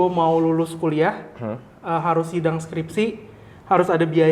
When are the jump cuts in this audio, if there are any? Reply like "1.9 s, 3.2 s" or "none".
none